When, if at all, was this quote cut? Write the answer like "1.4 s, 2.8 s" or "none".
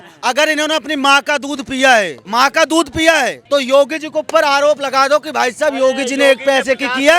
2.2 s, 3.4 s